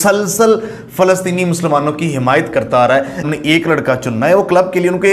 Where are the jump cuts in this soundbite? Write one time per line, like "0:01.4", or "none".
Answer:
0:03.3